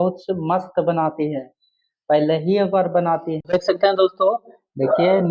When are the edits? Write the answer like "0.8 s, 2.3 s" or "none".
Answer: 3.4 s